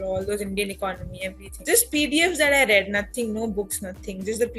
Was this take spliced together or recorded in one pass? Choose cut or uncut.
cut